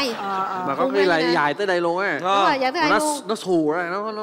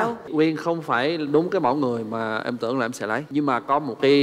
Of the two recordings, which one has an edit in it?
second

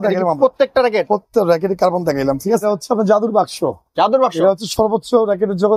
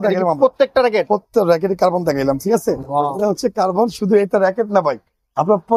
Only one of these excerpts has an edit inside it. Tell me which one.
first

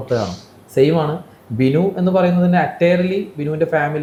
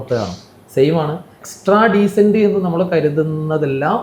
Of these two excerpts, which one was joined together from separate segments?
second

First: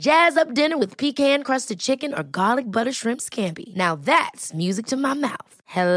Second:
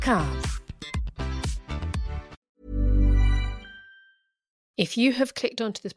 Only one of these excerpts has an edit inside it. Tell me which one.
second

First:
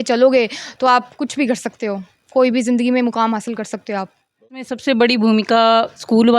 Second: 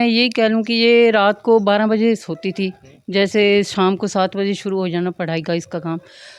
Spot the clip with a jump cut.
first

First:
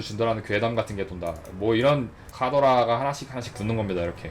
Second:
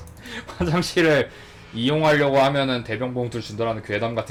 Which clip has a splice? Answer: first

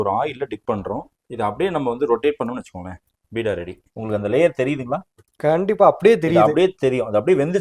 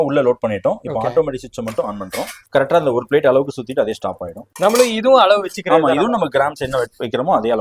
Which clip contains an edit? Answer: first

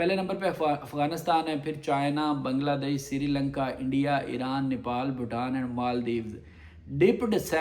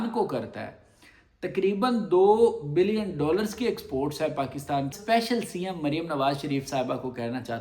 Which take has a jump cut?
second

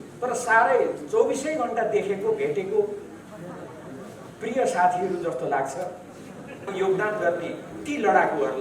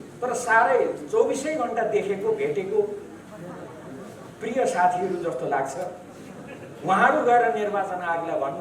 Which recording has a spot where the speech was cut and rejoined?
first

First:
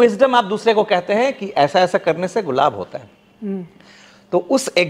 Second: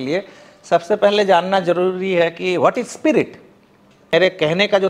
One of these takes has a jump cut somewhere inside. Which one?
second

